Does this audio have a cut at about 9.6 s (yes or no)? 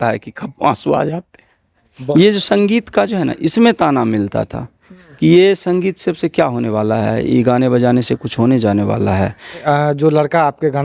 yes